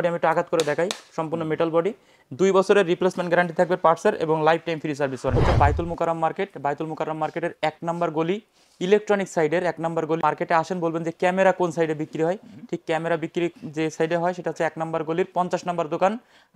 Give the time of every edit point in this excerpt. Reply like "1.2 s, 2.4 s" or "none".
5.4 s, 10.2 s

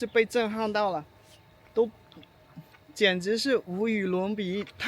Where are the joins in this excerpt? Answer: none

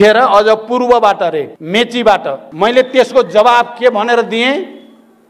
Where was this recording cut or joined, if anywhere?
1.6 s, 2.5 s

